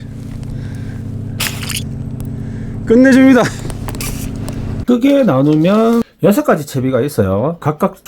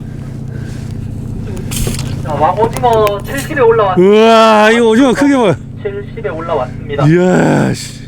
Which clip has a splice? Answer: first; 1 cut; at 4.7 s

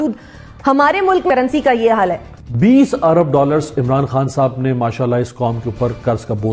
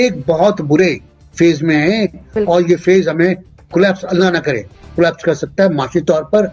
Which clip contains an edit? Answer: first; 2 cuts; at 1.3 s, 2.3 s

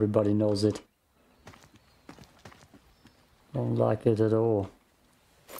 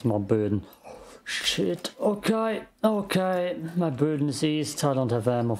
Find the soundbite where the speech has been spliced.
first; 1 cut; at 3.3 s

